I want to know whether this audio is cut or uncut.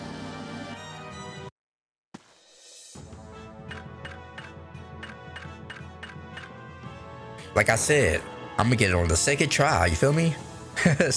uncut